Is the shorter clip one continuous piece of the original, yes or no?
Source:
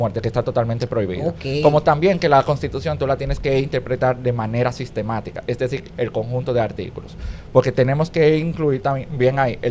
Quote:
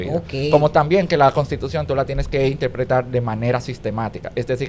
yes